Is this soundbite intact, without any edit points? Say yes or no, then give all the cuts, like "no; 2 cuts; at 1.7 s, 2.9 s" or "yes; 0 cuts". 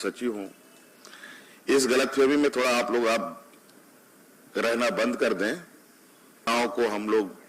no; 1 cut; at 6.5 s